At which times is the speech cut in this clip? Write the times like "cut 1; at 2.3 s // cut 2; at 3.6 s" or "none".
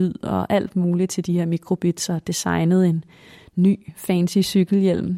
none